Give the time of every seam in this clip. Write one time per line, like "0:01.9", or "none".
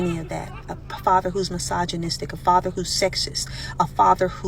0:03.4

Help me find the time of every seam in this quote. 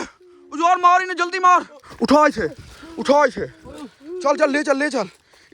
0:01.8

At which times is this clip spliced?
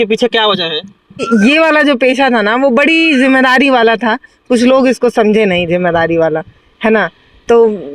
0:01.2

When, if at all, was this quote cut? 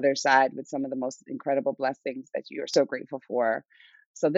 0:02.7

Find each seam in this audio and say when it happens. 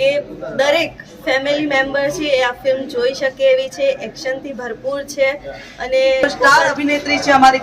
0:06.4

